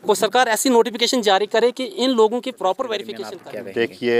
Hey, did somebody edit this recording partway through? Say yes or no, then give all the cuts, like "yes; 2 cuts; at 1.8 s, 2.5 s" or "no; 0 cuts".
yes; 1 cut; at 3.1 s